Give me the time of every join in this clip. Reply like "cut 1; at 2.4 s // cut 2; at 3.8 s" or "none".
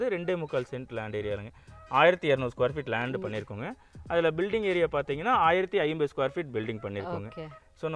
none